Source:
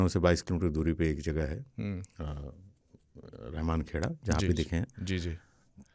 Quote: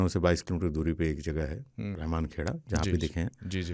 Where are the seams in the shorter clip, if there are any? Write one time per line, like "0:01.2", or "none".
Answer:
0:02.0